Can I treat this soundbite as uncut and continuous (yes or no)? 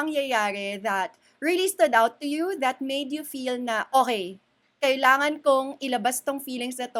yes